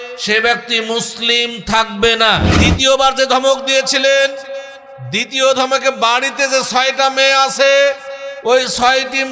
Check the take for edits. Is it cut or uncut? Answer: cut